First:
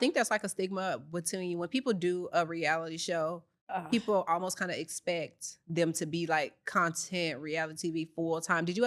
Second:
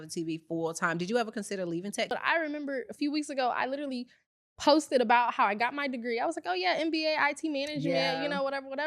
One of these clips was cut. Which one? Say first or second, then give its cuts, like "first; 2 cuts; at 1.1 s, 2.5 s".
second; 1 cut; at 2.1 s